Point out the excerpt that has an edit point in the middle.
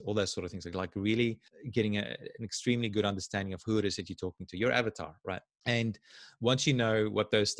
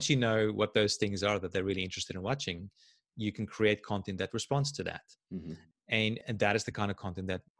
first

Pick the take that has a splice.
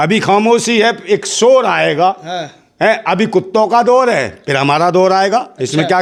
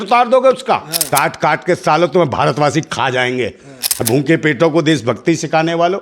second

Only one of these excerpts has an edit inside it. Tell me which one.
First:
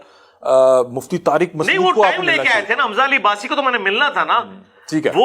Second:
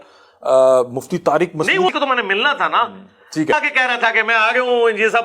second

